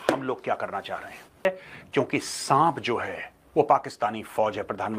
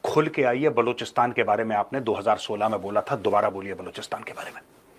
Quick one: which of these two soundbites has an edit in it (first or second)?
first